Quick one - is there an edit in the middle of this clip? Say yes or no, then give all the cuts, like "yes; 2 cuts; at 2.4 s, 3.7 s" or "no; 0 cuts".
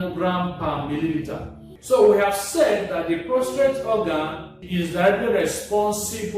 yes; 2 cuts; at 1.7 s, 4.6 s